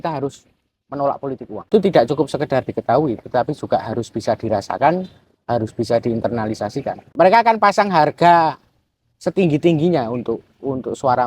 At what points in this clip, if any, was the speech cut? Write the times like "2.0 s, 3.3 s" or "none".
1.7 s, 7.0 s